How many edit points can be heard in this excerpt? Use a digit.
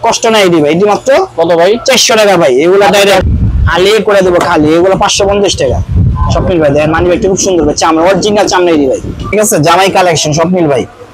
2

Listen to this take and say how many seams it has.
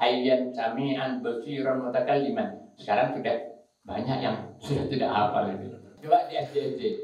1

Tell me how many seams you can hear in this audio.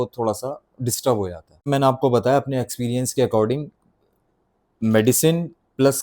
1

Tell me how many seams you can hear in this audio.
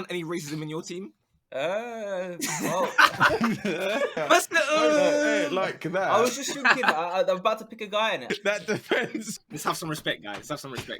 3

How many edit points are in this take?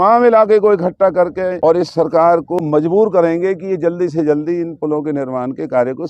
2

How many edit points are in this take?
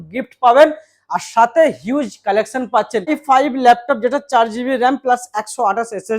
1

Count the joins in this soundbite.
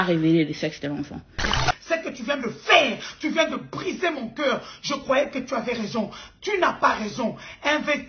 1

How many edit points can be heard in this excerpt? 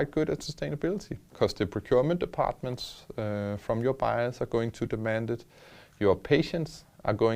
1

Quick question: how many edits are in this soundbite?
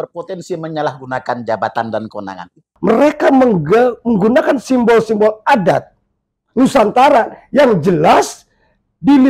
1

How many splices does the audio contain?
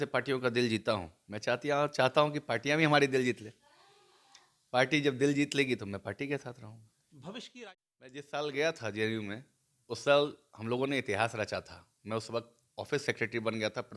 1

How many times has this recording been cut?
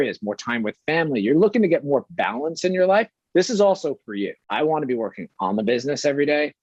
1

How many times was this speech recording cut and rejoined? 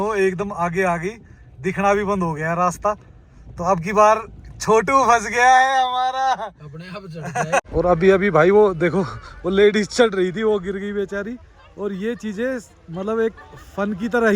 1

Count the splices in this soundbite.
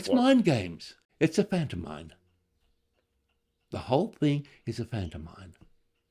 1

